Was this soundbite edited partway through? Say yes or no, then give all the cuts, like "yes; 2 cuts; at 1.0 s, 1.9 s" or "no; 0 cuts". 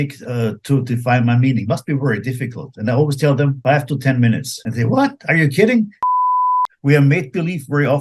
yes; 3 cuts; at 3.6 s, 4.6 s, 6.3 s